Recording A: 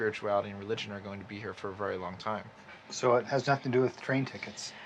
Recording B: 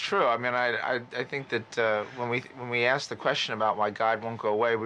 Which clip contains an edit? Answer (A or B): B